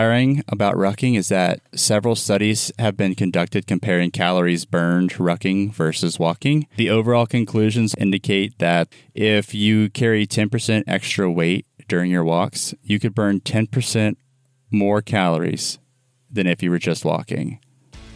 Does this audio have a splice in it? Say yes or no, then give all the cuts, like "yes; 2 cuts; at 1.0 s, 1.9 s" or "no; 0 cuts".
yes; 3 cuts; at 6.8 s, 7.9 s, 9.0 s